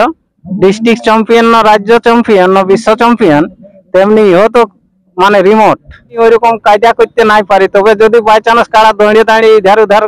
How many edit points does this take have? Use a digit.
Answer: 1